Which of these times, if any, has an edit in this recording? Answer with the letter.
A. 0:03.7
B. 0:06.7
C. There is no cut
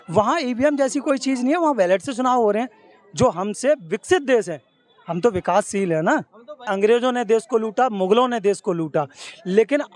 B